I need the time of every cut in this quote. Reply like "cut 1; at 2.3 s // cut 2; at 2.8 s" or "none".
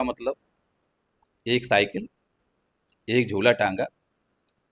none